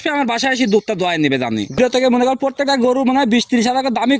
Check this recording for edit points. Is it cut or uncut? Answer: cut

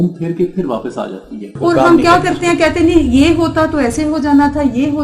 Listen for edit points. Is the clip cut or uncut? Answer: cut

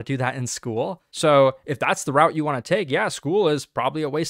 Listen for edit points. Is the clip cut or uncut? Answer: cut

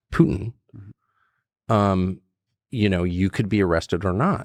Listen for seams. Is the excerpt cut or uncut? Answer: uncut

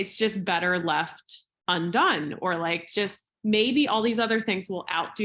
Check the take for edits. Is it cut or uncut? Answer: uncut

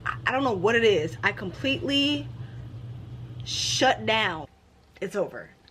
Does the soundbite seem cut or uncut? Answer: cut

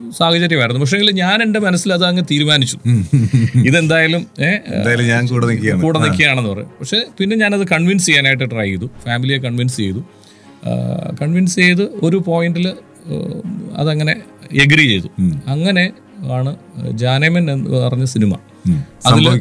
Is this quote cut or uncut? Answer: uncut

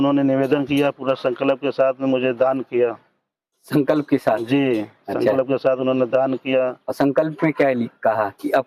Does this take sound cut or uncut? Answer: uncut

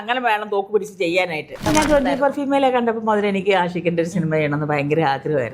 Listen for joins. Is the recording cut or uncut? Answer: cut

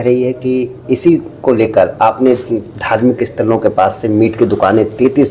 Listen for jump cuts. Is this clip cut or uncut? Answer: uncut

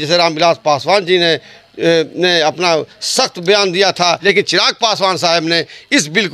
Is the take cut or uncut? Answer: cut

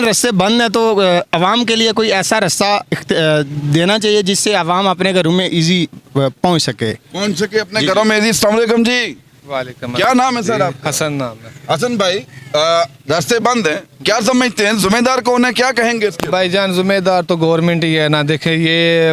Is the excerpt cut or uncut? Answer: uncut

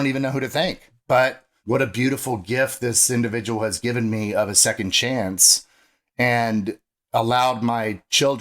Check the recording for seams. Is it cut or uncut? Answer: cut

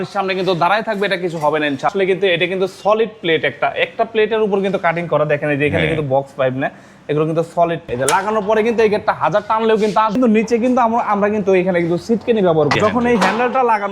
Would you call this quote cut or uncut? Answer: cut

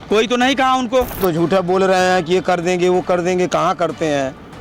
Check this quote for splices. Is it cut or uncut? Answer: cut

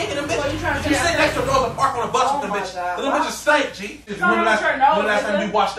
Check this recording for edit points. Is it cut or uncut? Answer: cut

